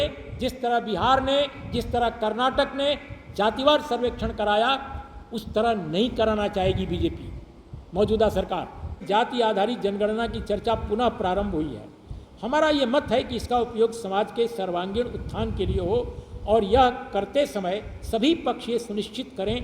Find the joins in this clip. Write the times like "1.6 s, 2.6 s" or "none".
9.0 s